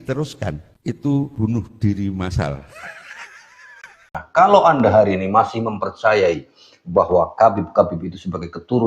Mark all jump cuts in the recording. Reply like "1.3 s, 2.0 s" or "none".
4.2 s